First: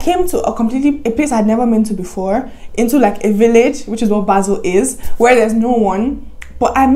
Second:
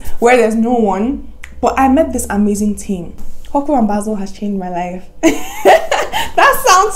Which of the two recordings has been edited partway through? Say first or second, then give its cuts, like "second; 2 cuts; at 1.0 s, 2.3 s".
second; 1 cut; at 3.3 s